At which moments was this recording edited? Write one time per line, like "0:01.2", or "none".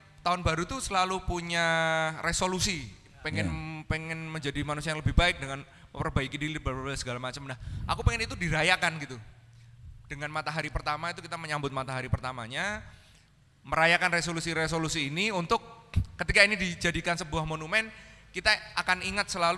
none